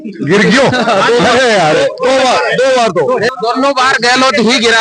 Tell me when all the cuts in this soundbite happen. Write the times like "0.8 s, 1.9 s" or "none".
3.3 s